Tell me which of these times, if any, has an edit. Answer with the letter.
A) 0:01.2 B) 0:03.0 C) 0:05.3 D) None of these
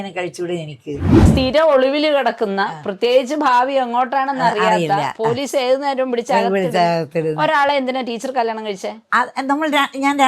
A